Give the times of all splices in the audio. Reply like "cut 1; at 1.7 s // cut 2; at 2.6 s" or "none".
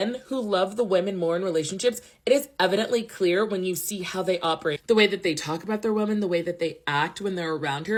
none